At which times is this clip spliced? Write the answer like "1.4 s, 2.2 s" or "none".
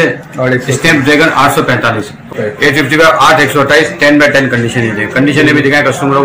2.2 s